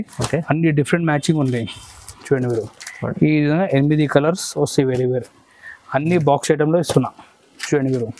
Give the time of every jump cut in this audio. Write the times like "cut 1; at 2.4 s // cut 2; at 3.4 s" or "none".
none